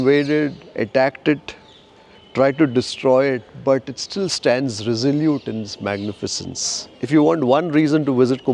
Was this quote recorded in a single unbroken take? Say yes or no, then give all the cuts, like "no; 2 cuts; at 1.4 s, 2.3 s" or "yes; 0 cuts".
no; 1 cut; at 6.8 s